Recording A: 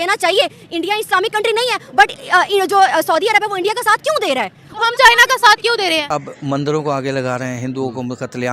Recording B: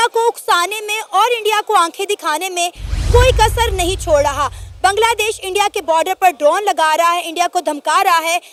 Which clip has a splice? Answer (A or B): A